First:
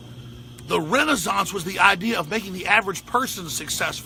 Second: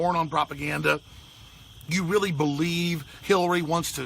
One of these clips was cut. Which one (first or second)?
second